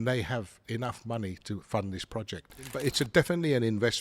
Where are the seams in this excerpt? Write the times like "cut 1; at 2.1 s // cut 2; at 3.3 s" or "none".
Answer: cut 1; at 2.7 s